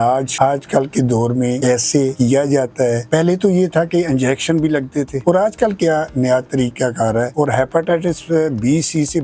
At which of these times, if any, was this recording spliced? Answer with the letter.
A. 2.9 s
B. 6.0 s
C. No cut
C